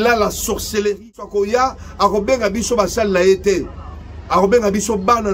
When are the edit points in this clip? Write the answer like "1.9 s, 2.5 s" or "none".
1.3 s